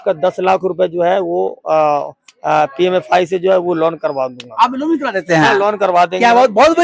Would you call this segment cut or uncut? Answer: uncut